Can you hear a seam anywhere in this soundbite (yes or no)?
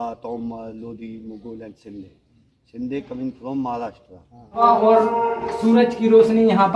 yes